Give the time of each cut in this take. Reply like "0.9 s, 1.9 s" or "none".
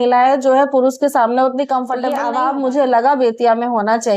2.1 s